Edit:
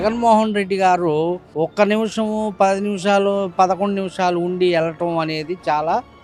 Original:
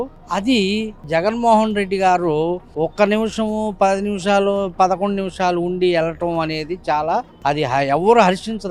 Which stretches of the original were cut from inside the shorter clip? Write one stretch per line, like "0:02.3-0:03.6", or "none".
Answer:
none